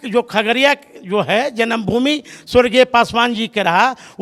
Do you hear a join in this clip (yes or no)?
no